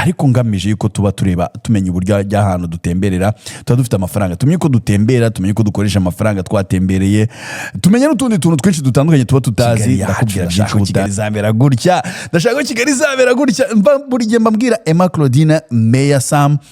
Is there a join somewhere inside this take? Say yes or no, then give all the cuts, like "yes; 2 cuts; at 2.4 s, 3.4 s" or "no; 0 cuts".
yes; 1 cut; at 11.1 s